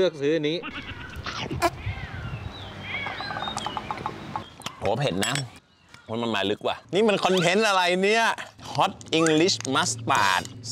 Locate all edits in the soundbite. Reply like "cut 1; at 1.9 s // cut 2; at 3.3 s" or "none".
cut 1; at 5.6 s // cut 2; at 6.8 s